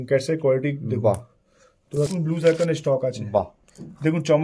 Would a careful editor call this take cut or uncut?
cut